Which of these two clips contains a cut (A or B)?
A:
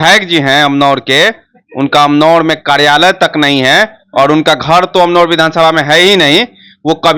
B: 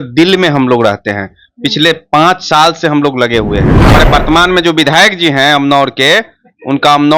B